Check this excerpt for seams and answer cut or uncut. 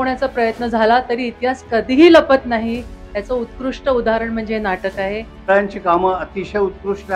cut